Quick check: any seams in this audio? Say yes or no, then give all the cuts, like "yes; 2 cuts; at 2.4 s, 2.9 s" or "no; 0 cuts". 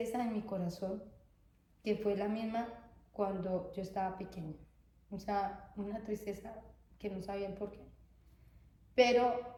no; 0 cuts